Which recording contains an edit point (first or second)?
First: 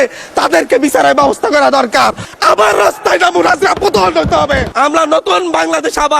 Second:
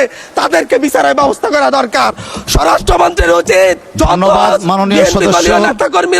first